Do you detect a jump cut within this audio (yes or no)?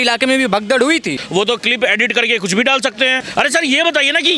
yes